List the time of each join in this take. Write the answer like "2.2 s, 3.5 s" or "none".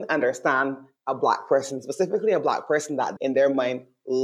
3.1 s